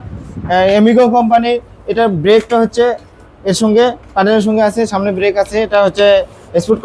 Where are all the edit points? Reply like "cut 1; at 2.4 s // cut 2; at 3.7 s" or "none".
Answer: none